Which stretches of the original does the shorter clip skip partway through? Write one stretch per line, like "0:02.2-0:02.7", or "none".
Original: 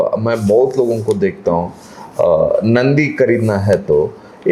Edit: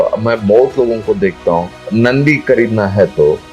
0:01.9-0:02.6